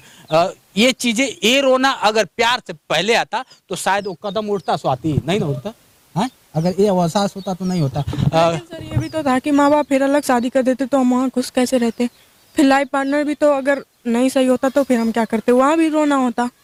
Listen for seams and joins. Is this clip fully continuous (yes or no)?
yes